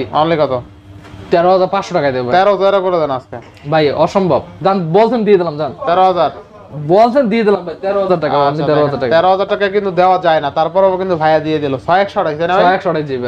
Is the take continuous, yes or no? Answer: yes